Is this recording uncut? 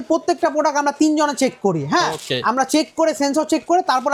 yes; 0 cuts

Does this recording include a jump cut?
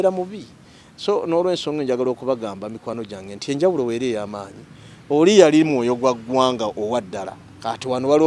no; 0 cuts

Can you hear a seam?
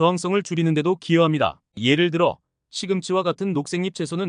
yes; 1 cut; at 1.6 s

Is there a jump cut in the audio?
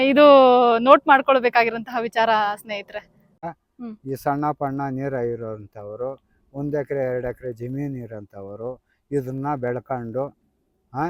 yes; 1 cut; at 3.5 s

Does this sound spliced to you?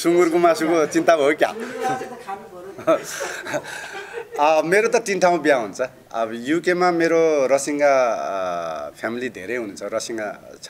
no; 0 cuts

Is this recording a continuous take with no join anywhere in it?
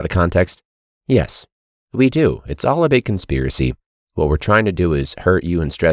yes; 0 cuts

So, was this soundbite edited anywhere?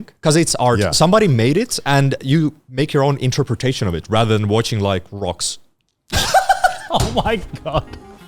no; 0 cuts

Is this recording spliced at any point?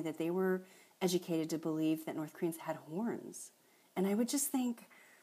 no; 0 cuts

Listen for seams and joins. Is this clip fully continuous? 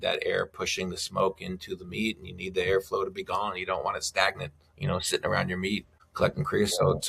no; 1 cut; at 6.1 s

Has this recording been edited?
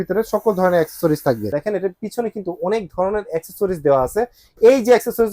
yes; 1 cut; at 1.6 s

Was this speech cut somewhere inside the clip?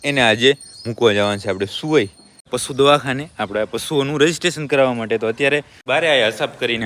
yes; 2 cuts; at 2.5 s, 5.8 s

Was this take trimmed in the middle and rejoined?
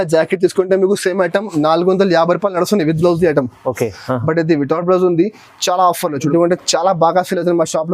yes; 1 cut; at 6.3 s

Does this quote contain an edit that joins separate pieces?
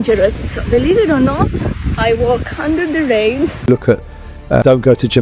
yes; 1 cut; at 3.6 s

